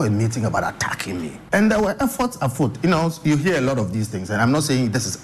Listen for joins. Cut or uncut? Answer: cut